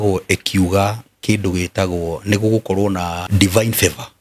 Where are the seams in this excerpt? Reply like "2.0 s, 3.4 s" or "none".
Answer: 3.2 s